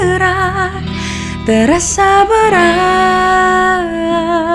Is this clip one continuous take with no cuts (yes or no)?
yes